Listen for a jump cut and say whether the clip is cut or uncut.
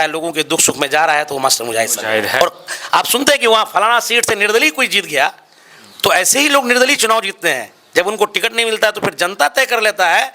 cut